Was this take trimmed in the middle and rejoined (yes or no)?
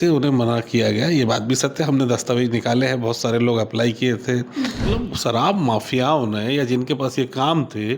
yes